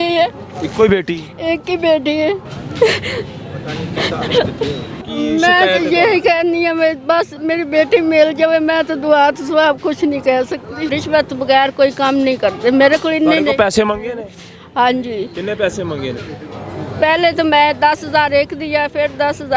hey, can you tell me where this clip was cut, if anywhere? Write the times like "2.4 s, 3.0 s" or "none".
2.6 s, 5.1 s, 11.0 s